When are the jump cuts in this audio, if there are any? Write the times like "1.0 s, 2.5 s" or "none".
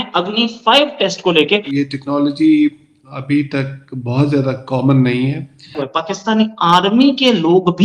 1.7 s, 5.9 s